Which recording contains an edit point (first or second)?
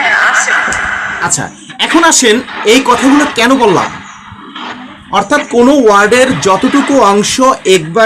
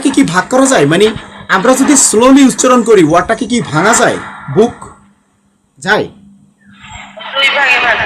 first